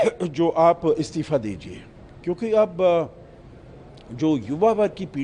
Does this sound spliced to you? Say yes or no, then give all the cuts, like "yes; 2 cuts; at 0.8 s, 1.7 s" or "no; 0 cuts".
no; 0 cuts